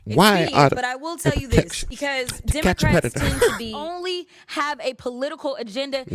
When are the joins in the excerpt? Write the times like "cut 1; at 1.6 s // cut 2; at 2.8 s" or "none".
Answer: cut 1; at 1.8 s // cut 2; at 3.8 s